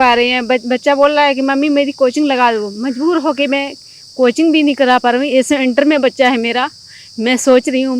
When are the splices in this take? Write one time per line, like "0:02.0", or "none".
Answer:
none